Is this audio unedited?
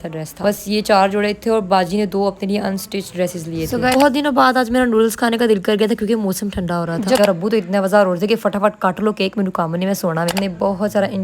no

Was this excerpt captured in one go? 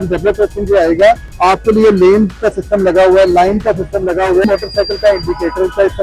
no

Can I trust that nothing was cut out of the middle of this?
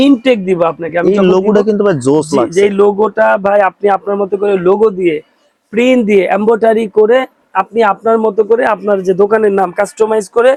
yes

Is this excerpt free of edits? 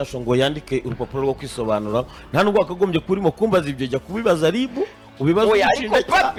yes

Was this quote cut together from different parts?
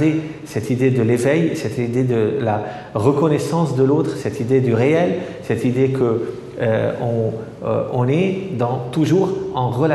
no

